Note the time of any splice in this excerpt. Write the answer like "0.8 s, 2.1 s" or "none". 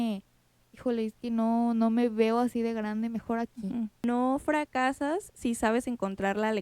4.0 s

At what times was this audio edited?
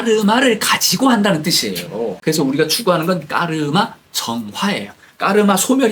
2.2 s

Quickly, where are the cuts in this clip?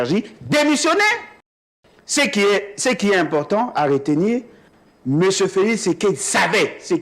1.5 s

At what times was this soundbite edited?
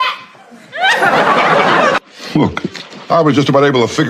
1.9 s

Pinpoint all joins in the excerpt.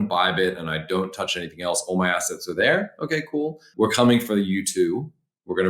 3.7 s

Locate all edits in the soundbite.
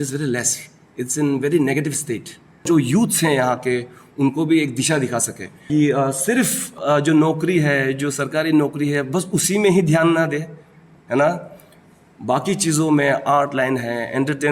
2.6 s, 5.6 s, 6.8 s

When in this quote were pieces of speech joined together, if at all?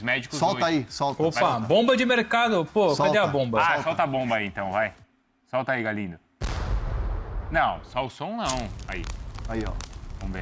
none

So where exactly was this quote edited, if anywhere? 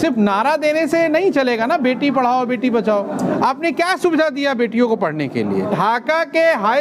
5.7 s

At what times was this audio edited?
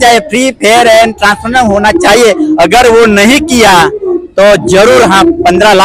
none

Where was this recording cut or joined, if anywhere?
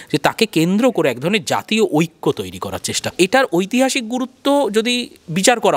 3.1 s

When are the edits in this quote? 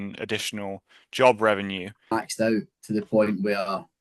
2.1 s

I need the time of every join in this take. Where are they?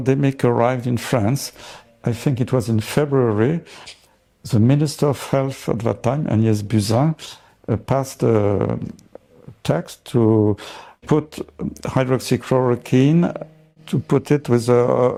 none

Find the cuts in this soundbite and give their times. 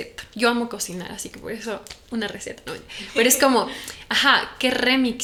none

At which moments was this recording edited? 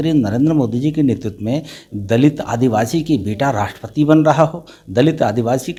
none

